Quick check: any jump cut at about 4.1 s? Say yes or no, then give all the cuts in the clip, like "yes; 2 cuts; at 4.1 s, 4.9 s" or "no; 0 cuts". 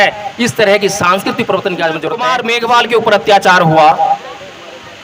no; 1 cut; at 2.3 s